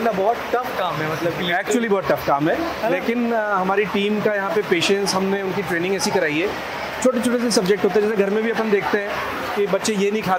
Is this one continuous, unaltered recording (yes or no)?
yes